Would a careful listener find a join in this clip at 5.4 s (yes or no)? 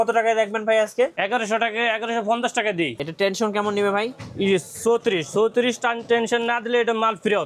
no